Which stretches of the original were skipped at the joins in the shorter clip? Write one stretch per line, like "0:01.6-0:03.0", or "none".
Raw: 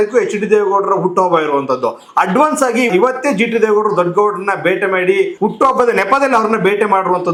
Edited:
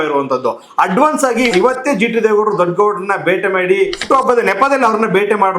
0:05.4-0:05.5